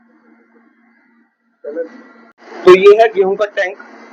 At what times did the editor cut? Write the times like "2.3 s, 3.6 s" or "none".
none